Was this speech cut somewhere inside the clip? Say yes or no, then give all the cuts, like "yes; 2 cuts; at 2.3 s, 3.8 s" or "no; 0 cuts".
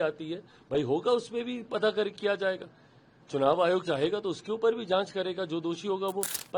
no; 0 cuts